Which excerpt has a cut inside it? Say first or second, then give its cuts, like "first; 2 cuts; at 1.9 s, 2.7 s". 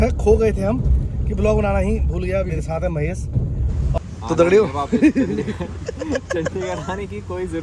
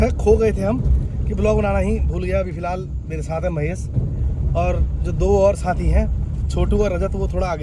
first; 2 cuts; at 2.5 s, 4.0 s